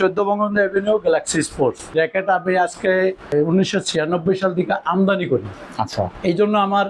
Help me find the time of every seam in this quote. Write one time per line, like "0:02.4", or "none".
0:01.9
0:03.3
0:05.6